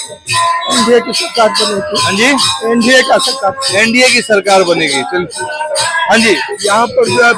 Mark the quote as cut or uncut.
uncut